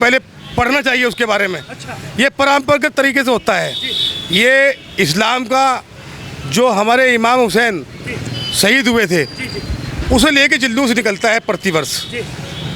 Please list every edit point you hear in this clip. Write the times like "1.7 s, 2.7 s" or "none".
none